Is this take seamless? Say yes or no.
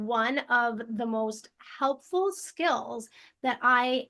yes